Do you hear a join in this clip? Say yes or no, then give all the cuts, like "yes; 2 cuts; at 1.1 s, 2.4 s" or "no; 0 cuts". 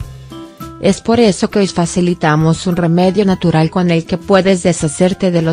no; 0 cuts